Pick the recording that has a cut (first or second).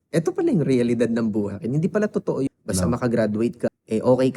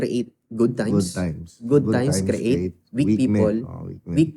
first